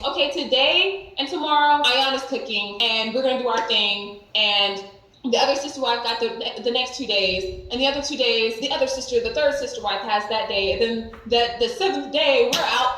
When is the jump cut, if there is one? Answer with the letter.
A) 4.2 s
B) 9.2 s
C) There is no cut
A